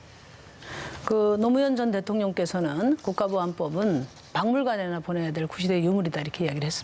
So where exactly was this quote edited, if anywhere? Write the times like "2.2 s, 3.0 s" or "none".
none